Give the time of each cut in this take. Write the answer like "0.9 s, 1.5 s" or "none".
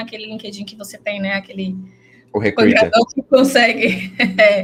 none